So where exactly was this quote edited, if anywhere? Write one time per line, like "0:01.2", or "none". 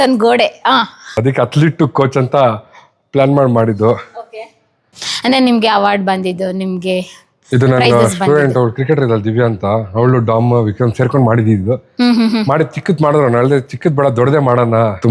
none